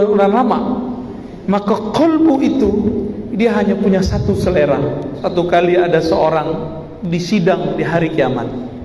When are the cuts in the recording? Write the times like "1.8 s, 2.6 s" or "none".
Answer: 5.2 s